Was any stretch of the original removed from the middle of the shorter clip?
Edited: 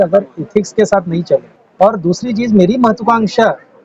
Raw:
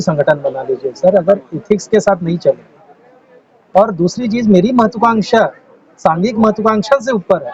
yes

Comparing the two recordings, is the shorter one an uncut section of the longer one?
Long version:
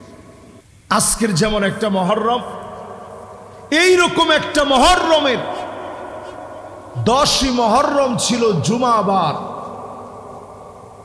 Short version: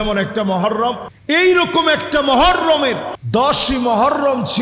no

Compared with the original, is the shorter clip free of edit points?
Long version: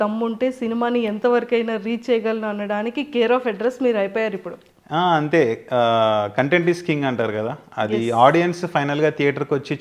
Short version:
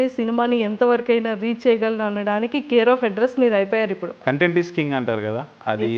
no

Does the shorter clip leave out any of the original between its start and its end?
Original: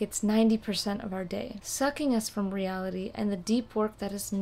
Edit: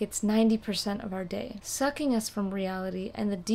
no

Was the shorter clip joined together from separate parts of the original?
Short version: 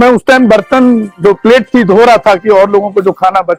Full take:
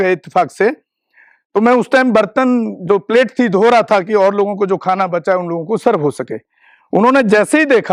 no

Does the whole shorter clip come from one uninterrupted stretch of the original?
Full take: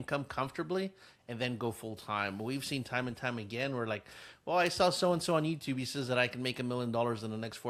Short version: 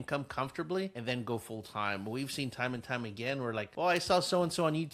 no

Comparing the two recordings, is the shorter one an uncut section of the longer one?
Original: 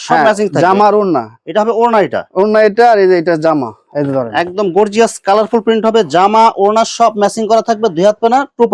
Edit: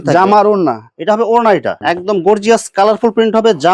no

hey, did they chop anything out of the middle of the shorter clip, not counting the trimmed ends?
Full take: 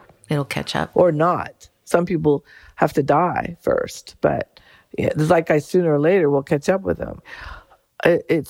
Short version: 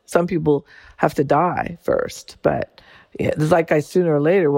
no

